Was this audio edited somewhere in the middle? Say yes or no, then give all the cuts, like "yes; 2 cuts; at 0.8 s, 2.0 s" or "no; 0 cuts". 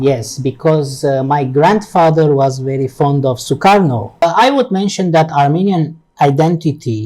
yes; 1 cut; at 4.2 s